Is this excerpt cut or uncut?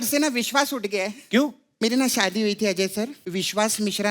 cut